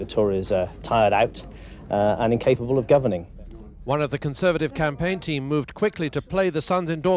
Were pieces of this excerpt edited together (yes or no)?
no